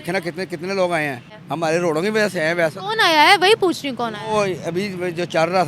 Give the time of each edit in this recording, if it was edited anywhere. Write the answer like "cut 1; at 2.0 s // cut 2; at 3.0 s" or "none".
cut 1; at 1.3 s